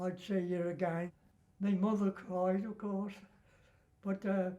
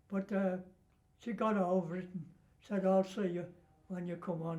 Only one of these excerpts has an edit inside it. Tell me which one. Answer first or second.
first